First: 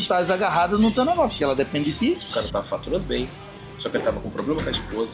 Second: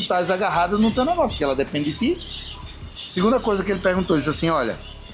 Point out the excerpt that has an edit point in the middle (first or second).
first